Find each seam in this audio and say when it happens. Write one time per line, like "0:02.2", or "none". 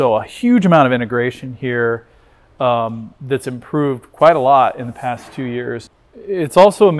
0:06.0